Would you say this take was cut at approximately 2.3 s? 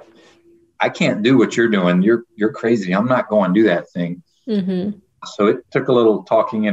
no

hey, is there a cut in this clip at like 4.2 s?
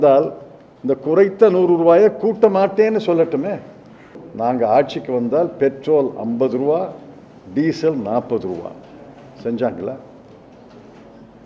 yes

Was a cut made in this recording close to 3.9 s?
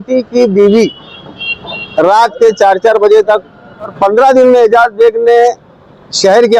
yes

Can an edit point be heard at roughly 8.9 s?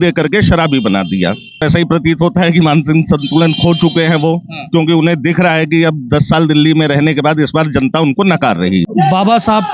yes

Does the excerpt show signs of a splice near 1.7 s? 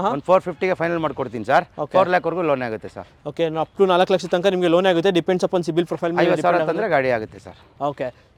no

